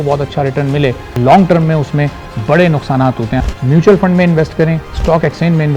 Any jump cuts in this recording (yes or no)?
yes